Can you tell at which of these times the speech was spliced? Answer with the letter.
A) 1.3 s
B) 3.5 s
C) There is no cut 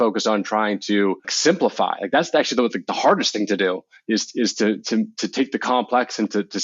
A